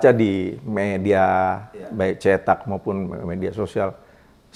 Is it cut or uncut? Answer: uncut